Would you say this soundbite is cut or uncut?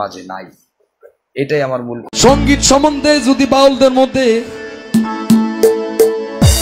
cut